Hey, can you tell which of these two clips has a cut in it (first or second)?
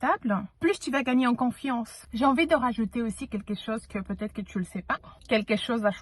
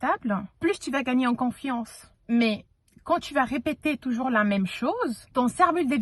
first